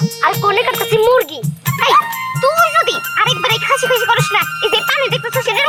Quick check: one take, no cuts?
yes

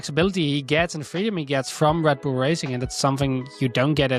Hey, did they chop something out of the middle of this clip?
no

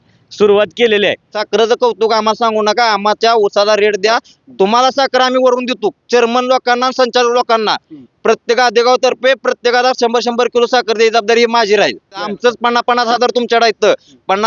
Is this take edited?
yes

